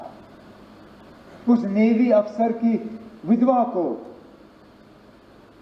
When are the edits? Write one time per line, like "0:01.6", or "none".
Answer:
0:01.0